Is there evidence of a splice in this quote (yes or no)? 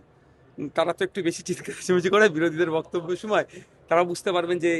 no